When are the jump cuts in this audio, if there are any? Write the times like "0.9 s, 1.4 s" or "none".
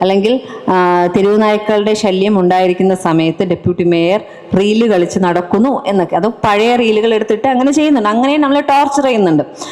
none